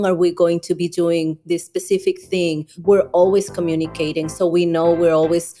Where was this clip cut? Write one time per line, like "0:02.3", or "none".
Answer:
0:02.7